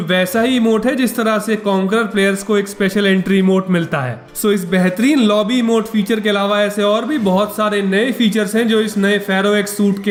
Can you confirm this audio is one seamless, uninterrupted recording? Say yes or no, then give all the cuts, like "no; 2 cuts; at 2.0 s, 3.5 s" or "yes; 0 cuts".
yes; 0 cuts